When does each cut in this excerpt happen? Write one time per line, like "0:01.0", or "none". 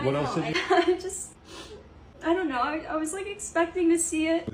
none